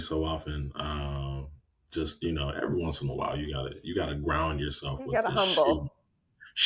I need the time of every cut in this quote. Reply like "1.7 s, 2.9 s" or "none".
none